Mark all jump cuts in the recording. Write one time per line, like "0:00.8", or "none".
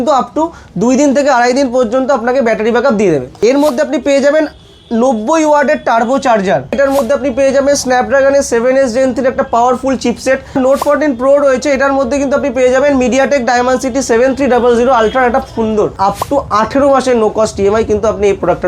0:03.3
0:06.8
0:10.5
0:16.0